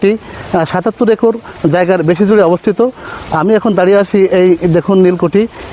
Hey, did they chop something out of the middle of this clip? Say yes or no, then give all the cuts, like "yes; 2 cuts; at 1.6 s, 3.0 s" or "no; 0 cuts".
no; 0 cuts